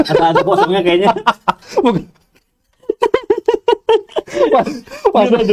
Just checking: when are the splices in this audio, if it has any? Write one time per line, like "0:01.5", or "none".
none